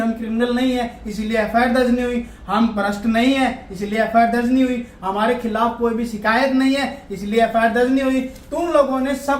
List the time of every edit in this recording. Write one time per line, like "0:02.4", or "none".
none